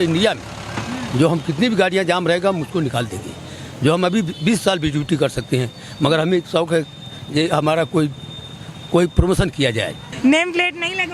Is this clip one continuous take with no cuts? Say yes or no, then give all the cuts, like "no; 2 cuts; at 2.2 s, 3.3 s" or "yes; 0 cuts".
yes; 0 cuts